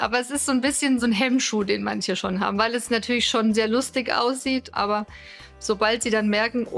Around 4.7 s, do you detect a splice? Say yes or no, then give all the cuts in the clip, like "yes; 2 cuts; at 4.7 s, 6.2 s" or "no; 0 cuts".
yes; 2 cuts; at 1.0 s, 4.7 s